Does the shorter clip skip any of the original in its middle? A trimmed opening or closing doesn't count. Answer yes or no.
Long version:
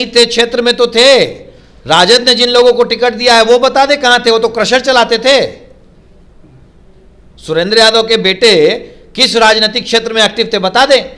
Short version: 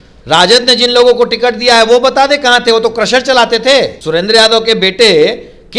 yes